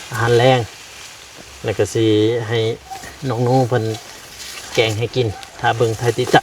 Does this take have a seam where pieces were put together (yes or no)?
no